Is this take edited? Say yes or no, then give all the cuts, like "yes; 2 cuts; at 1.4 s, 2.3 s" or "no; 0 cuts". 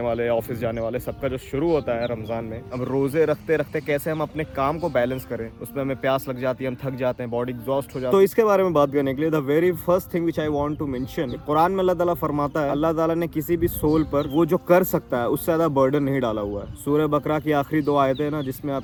no; 0 cuts